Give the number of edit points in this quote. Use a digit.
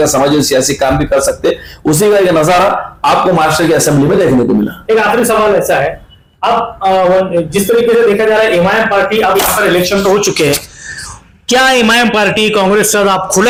0